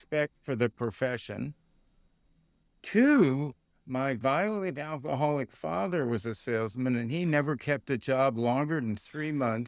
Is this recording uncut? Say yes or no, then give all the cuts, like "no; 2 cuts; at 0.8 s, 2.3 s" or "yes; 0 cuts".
yes; 0 cuts